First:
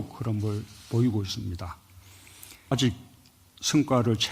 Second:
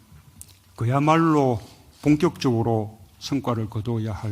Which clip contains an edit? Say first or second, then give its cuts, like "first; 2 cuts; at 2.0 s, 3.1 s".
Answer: first; 1 cut; at 2.7 s